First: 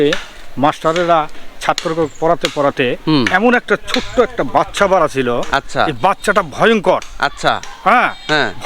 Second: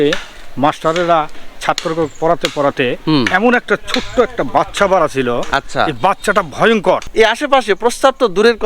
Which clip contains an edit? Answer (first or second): second